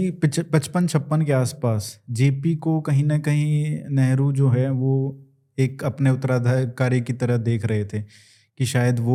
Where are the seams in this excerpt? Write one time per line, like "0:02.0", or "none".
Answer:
none